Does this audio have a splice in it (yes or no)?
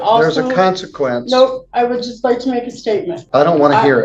yes